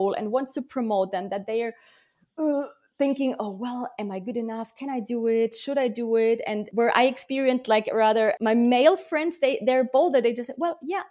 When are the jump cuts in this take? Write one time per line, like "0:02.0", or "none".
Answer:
0:06.6
0:08.4